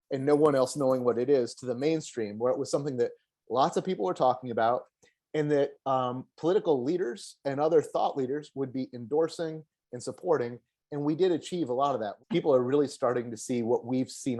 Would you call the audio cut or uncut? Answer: cut